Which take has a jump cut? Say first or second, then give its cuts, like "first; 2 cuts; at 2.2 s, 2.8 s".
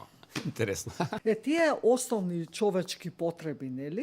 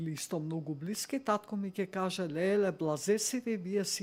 first; 1 cut; at 1.2 s